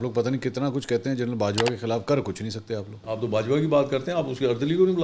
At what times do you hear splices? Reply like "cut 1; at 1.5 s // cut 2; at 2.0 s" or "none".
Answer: cut 1; at 3.0 s